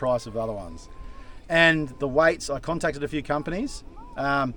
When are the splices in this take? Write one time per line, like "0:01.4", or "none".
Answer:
none

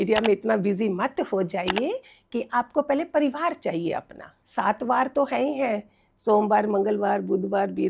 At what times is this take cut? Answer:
0:04.3

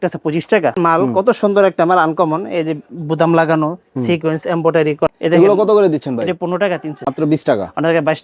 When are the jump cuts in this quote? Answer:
0:00.7
0:05.1
0:06.9

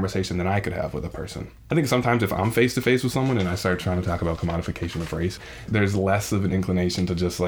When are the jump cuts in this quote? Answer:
0:01.6
0:05.6

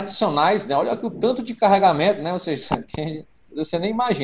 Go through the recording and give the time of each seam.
none

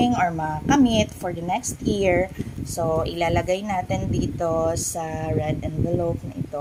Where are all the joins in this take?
none

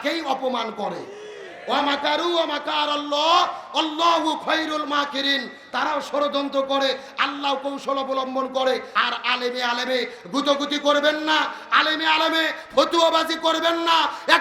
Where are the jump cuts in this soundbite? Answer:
0:08.9

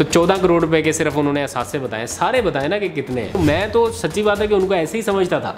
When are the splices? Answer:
0:03.4

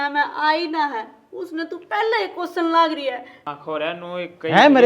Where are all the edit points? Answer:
0:03.4

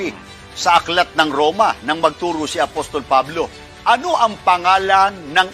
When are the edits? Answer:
none

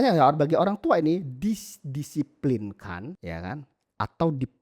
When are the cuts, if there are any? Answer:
0:03.2

